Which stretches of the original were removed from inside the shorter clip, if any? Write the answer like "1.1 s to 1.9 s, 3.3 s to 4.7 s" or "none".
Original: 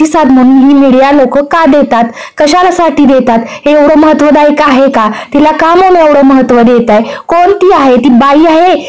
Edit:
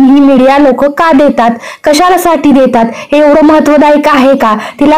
none